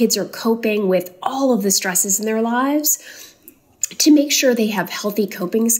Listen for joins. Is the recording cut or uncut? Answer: uncut